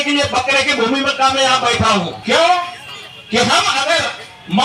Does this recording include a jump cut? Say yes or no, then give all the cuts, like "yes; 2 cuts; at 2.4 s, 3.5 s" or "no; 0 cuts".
yes; 1 cut; at 2.1 s